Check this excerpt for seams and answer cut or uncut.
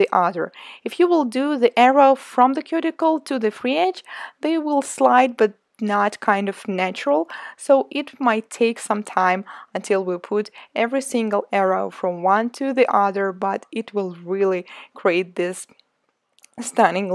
uncut